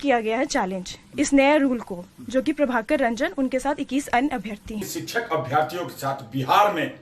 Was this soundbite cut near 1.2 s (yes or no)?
no